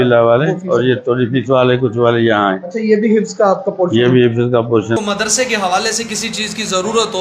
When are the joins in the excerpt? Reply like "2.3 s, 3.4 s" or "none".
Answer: 5.0 s